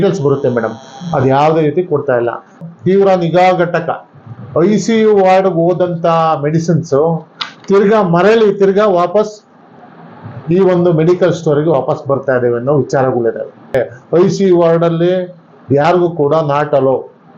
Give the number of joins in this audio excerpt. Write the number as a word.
two